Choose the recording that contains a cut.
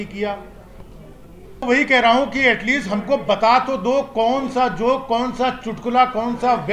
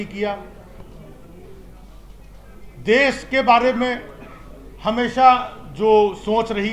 first; 1 cut; at 1.6 s

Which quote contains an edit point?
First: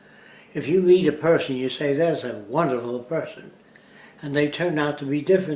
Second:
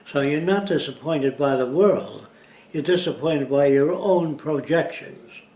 second; 1 cut; at 3.6 s

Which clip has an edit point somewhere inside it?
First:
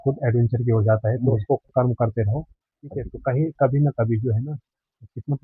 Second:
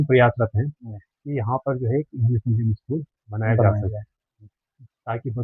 first; 1 cut; at 1.7 s

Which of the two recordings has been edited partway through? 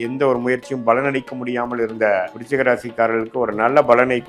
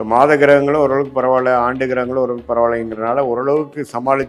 first; 1 cut; at 2.4 s

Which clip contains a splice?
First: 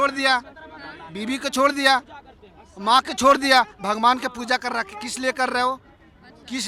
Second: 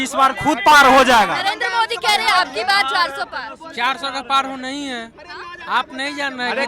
second; 1 cut; at 1.4 s

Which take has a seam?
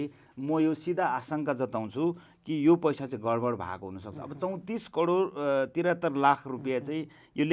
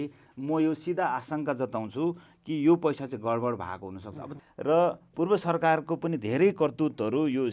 second; 1 cut; at 4.3 s

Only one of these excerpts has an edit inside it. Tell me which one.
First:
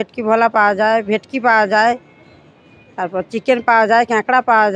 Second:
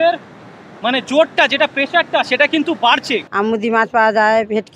second; 1 cut; at 3.3 s

